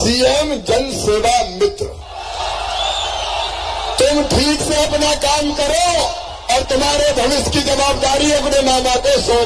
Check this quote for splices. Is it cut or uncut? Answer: uncut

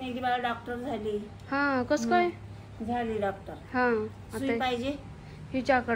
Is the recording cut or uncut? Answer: uncut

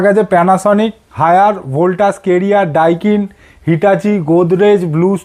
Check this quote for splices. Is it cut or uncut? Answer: cut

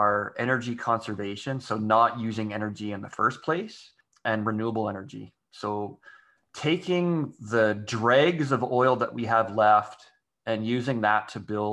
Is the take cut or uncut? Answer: cut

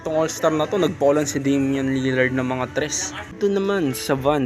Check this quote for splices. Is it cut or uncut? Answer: cut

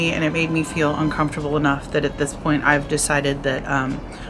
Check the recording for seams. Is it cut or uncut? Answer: uncut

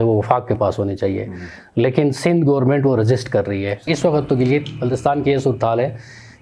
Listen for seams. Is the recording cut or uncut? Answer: cut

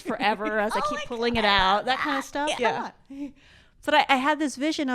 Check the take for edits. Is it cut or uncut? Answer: cut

